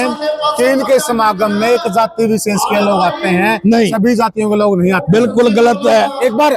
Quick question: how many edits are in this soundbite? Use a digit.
0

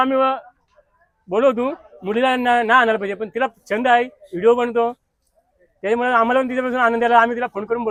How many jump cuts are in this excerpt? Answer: 0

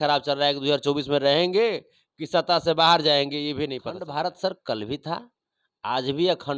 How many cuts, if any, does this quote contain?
1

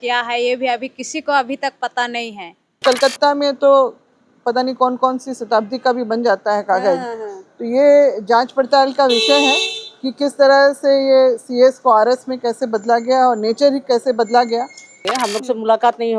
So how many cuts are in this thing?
2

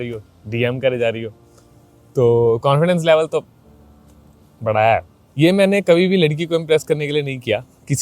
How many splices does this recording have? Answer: 0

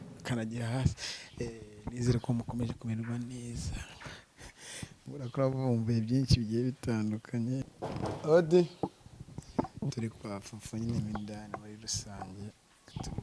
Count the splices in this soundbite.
1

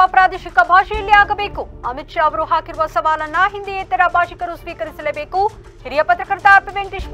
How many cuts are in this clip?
0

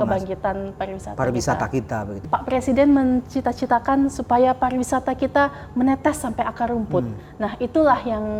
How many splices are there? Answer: 1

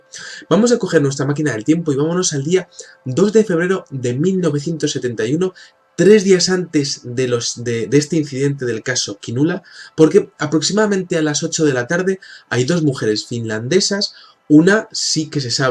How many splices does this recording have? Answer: 1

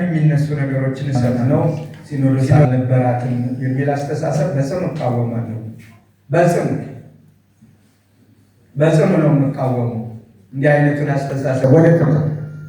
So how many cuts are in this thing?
1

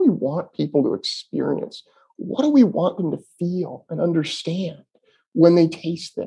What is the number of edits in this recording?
0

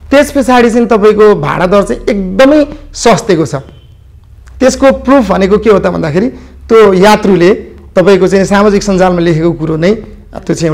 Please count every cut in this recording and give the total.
0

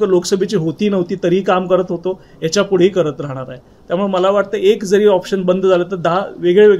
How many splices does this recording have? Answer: 0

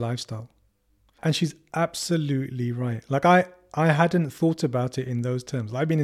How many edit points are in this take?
1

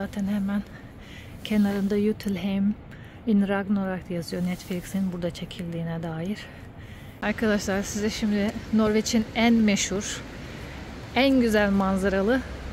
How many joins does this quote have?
1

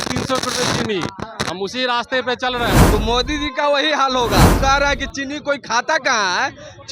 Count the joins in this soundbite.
2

